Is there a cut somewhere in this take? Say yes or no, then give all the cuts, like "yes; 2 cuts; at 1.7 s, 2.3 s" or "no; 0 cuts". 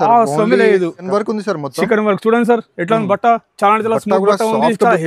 yes; 1 cut; at 1.1 s